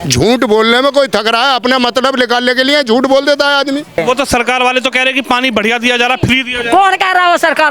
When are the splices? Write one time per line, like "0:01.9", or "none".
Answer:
0:03.9

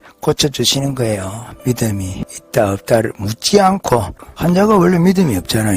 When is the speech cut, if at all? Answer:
0:01.5
0:02.2
0:04.1

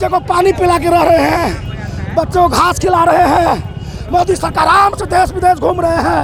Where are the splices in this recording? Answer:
none

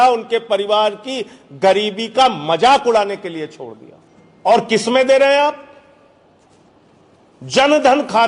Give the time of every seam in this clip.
none

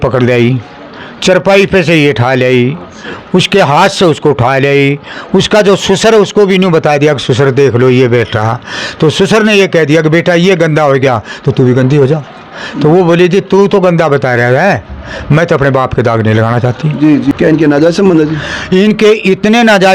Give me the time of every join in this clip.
0:17.3

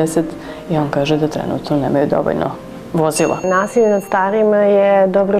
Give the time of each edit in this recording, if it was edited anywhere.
0:03.4

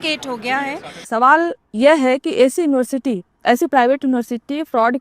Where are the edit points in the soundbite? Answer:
0:01.0

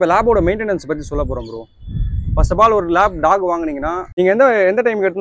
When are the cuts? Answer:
0:04.0

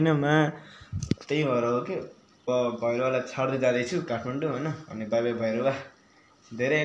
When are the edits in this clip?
0:02.5

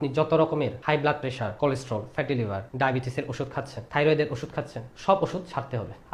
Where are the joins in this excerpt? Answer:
0:01.0
0:02.7

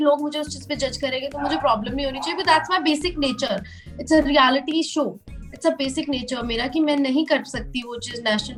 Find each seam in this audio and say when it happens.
none

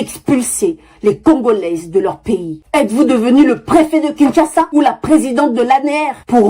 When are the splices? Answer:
0:02.5

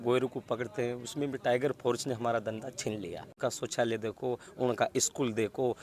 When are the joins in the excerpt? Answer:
0:03.3

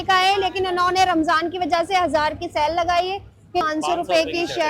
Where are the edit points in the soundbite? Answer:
0:03.6

